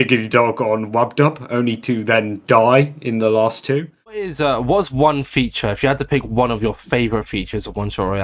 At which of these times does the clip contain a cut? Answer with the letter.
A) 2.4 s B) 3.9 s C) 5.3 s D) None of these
B